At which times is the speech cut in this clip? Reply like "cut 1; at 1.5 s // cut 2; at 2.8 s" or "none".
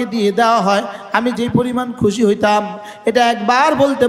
none